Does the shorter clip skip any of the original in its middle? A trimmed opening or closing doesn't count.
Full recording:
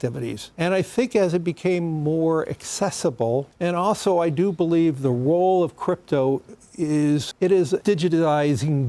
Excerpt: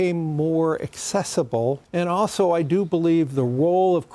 no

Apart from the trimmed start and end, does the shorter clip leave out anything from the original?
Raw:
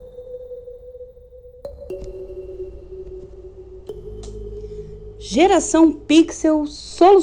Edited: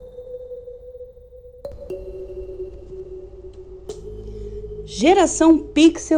yes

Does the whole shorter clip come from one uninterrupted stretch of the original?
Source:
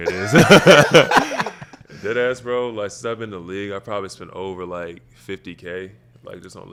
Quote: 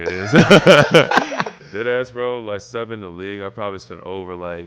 no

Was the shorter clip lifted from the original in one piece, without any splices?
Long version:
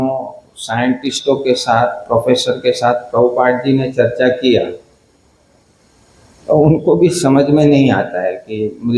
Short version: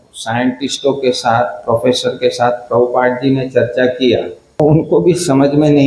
no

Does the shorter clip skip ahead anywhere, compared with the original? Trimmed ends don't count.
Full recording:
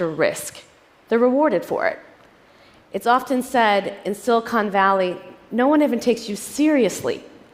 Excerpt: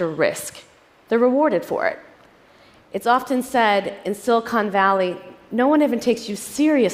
no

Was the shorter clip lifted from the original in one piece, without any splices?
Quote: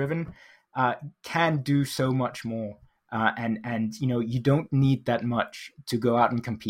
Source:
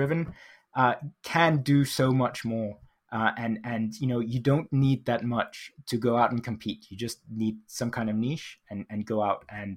yes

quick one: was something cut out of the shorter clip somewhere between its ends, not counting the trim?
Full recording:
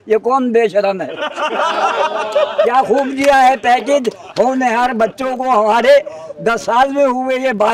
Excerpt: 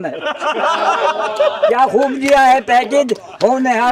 no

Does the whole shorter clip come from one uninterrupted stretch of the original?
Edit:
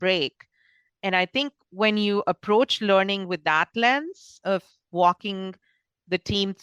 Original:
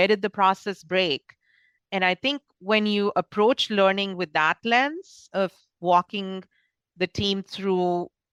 yes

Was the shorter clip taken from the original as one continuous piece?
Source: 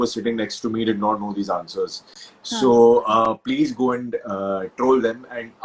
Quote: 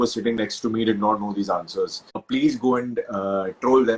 no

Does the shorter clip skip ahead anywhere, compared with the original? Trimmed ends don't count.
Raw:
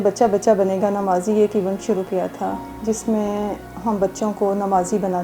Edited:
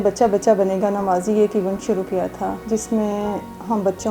yes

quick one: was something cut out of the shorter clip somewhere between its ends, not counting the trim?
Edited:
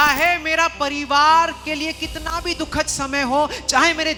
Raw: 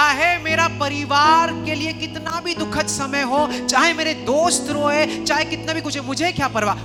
no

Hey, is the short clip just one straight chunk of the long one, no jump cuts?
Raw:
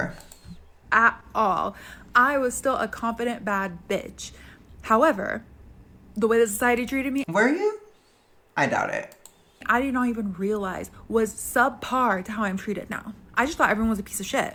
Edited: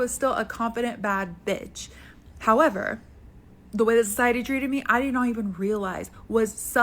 no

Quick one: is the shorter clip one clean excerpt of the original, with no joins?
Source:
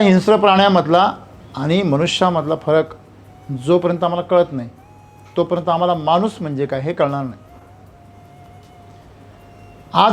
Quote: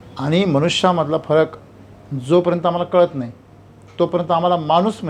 yes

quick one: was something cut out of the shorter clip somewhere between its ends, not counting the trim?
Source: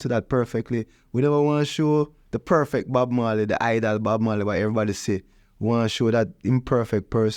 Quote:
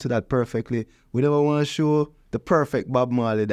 no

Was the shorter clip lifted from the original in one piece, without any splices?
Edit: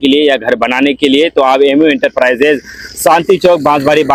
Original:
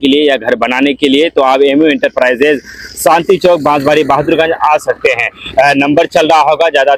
yes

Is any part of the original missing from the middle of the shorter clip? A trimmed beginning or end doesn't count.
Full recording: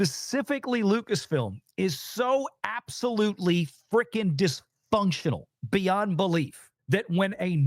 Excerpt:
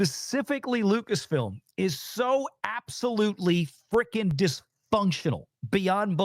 no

